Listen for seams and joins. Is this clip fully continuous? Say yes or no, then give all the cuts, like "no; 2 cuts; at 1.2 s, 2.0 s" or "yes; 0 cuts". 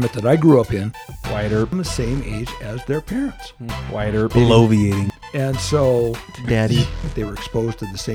no; 1 cut; at 7.1 s